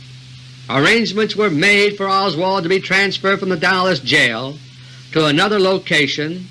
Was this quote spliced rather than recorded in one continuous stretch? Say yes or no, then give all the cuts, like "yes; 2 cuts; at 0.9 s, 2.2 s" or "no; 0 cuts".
yes; 1 cut; at 2.6 s